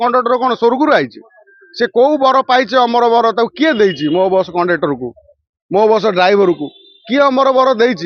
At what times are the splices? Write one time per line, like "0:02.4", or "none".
none